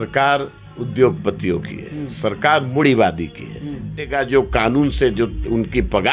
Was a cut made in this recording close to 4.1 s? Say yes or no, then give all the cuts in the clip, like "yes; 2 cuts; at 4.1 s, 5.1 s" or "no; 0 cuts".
yes; 1 cut; at 4.1 s